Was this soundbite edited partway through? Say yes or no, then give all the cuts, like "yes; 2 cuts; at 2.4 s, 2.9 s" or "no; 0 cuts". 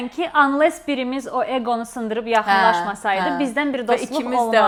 no; 0 cuts